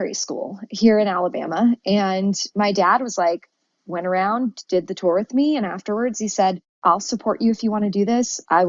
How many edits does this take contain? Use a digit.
1